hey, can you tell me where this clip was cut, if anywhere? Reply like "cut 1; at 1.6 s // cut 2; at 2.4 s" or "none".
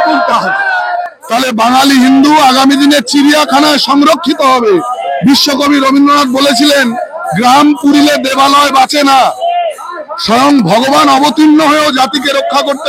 cut 1; at 1.1 s